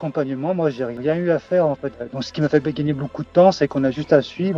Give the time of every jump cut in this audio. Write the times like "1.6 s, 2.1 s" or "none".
0.9 s, 1.9 s

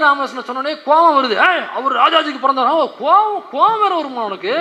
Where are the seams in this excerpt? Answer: none

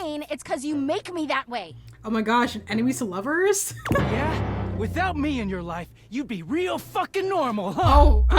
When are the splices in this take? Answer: none

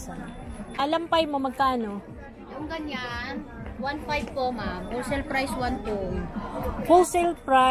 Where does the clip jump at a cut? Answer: 1.0 s

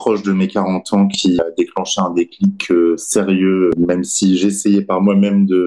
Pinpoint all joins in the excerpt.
1.4 s, 3.7 s

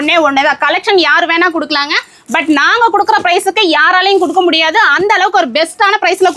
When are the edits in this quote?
none

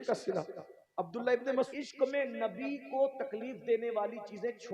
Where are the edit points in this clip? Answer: 1.7 s

